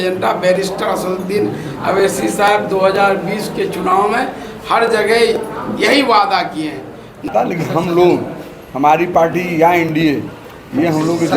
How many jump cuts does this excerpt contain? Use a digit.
1